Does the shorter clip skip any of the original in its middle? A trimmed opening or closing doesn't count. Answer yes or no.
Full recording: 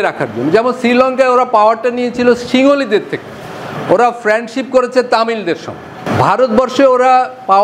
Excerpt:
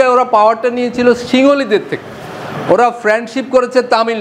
no